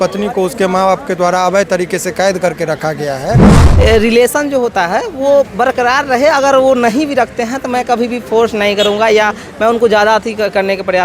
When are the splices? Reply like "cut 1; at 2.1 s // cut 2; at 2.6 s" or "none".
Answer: cut 1; at 3.6 s